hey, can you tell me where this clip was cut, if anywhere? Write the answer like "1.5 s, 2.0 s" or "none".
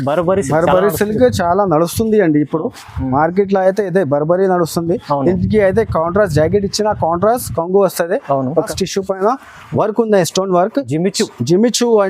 8.7 s